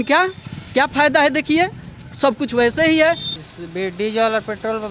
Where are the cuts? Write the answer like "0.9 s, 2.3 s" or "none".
3.3 s